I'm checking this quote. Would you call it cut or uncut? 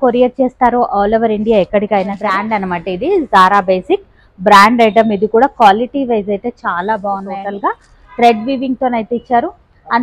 cut